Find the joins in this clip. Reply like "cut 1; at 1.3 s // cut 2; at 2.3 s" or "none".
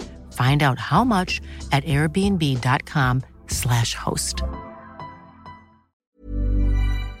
cut 1; at 6.0 s